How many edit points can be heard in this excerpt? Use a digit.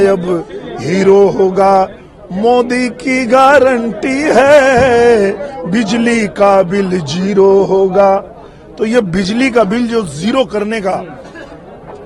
0